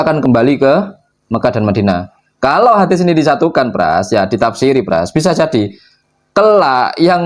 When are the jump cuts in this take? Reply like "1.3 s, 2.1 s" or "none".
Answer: none